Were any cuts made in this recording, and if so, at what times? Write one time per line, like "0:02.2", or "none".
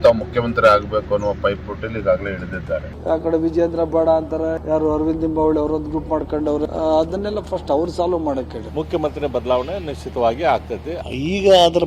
0:02.9
0:04.6
0:06.7
0:08.6
0:10.9